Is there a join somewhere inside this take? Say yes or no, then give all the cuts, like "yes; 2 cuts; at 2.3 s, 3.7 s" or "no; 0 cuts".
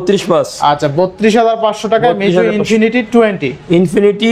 no; 0 cuts